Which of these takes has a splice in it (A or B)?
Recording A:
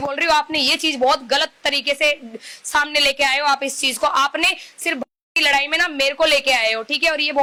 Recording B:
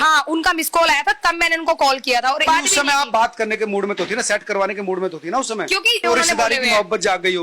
B